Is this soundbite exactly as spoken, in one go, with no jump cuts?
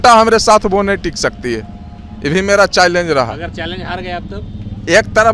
yes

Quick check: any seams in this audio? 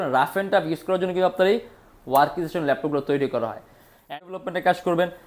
yes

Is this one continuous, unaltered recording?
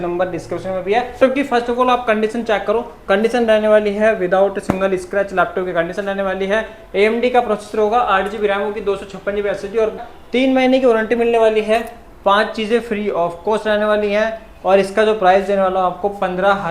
no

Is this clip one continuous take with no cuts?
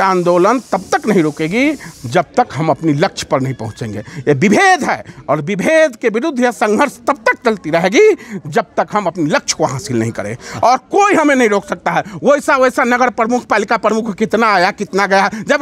yes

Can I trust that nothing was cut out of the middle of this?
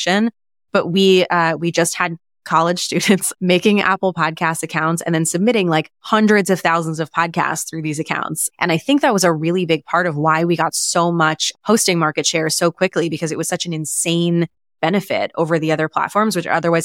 no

